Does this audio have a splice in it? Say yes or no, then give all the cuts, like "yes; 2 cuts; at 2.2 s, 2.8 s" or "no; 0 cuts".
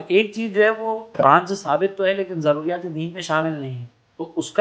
yes; 1 cut; at 1.2 s